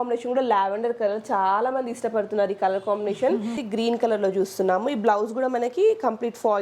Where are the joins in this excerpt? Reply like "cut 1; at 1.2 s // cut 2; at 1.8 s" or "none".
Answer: cut 1; at 3.6 s